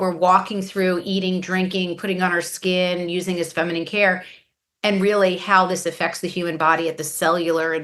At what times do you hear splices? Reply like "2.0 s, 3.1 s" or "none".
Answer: none